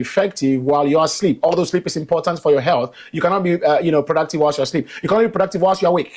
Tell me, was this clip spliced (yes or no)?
no